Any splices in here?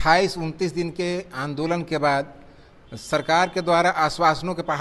no; 0 cuts

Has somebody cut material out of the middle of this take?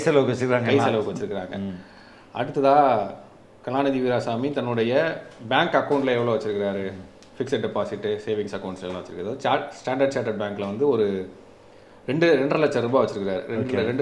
no; 0 cuts

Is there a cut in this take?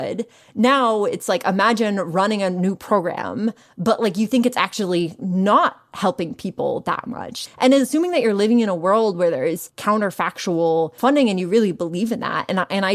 yes; 3 cuts; at 7.4 s, 9.7 s, 10.9 s

